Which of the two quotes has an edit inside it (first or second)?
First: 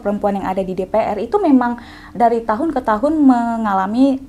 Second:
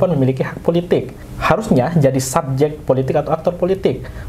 second